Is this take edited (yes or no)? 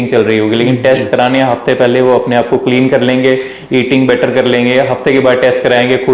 no